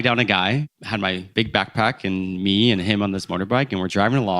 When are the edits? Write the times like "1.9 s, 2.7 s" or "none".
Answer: 1.2 s